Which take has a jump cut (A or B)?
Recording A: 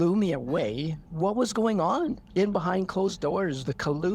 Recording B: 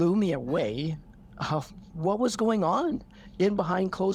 A